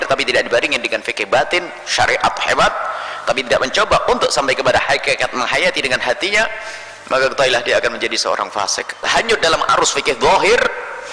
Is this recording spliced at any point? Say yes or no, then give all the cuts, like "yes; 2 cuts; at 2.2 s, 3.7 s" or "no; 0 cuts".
yes; 1 cut; at 9.0 s